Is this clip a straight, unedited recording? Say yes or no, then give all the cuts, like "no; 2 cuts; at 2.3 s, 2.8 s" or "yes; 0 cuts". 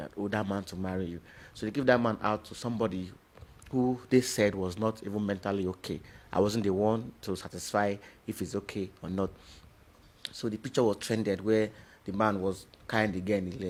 yes; 0 cuts